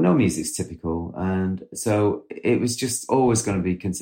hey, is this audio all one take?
no; 2 cuts; at 1.7 s, 3.0 s

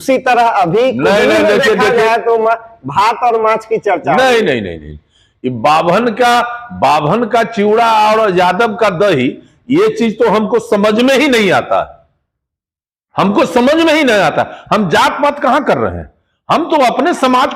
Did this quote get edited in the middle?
no; 0 cuts

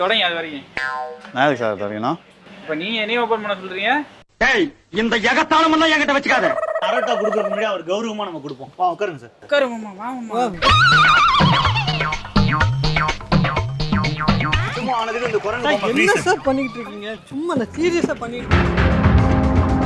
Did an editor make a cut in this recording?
yes; 1 cut; at 7.2 s

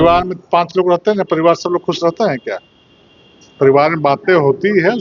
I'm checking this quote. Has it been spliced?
no; 0 cuts

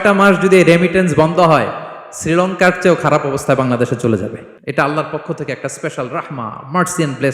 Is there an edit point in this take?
yes; 1 cut; at 4.5 s

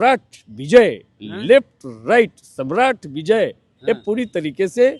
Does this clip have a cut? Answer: no; 0 cuts

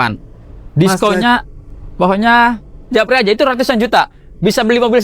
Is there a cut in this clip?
no; 0 cuts

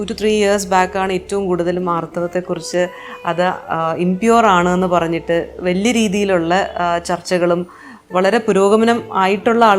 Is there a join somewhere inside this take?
no; 0 cuts

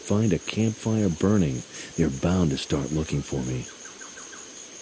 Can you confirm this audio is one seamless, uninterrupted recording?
no; 1 cut; at 3.7 s

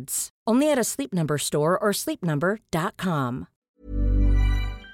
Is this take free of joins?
no; 1 cut; at 3.5 s

